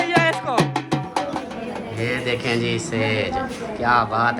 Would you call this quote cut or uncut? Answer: cut